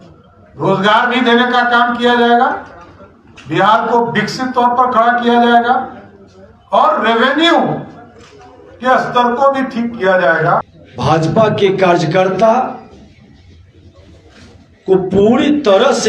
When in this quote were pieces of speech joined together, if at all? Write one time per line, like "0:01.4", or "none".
0:10.8